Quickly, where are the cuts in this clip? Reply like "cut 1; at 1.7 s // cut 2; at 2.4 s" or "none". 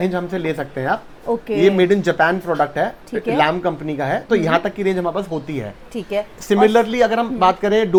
none